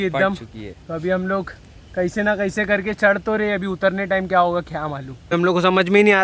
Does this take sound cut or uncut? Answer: cut